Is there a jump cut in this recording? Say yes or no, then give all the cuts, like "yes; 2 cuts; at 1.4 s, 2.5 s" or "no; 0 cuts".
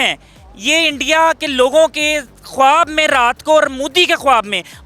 no; 0 cuts